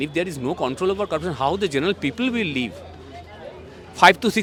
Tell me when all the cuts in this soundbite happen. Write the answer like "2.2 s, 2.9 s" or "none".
none